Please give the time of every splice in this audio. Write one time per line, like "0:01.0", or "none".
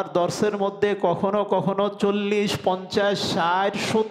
none